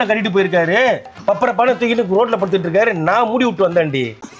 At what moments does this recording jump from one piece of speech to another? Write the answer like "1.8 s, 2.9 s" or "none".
none